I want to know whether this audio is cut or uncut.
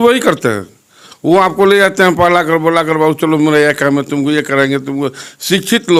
uncut